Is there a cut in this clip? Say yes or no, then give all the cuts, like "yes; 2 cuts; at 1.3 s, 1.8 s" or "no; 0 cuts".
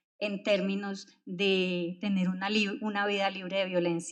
no; 0 cuts